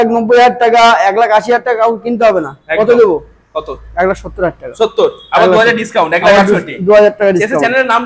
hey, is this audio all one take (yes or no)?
yes